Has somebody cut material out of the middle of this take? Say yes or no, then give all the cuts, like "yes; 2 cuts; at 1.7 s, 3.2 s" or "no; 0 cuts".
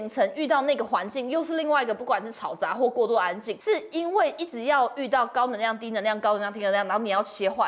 yes; 1 cut; at 3.5 s